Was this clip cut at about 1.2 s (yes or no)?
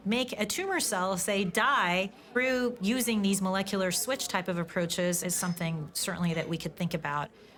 no